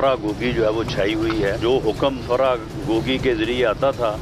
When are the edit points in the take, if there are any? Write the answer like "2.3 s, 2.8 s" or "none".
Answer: 1.6 s